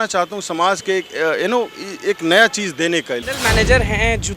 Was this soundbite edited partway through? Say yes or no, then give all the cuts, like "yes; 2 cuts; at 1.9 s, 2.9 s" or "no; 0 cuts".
yes; 1 cut; at 3.3 s